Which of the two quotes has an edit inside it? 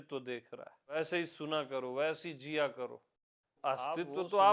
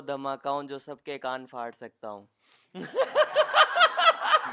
first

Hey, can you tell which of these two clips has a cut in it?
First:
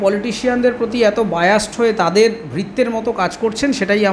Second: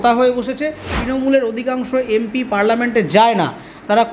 second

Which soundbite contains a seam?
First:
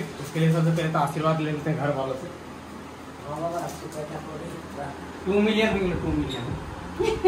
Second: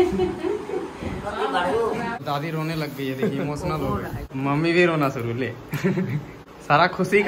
second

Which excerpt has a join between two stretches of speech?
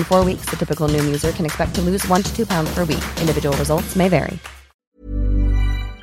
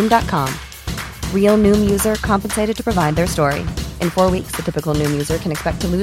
first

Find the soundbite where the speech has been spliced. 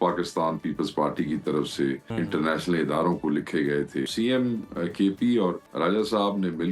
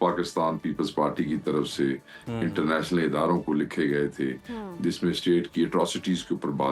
first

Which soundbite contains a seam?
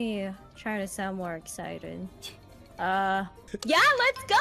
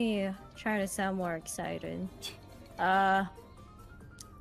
first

